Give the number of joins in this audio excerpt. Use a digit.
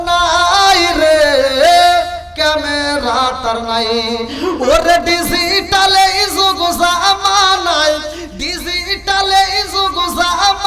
0